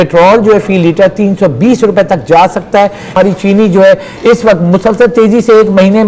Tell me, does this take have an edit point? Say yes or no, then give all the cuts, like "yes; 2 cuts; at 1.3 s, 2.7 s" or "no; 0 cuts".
yes; 1 cut; at 3.1 s